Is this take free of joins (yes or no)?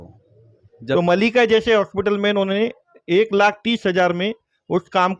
no